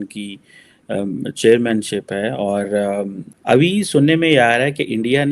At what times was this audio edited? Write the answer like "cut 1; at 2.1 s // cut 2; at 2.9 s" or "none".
cut 1; at 3.3 s